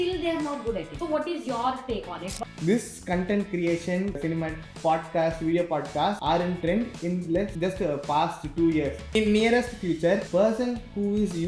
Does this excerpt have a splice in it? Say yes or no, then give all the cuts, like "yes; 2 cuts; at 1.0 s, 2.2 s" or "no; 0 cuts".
yes; 7 cuts; at 0.9 s, 2.3 s, 4.2 s, 6.2 s, 7.5 s, 9.1 s, 10.3 s